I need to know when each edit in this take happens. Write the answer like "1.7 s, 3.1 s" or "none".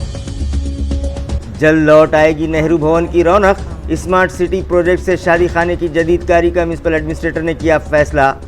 1.0 s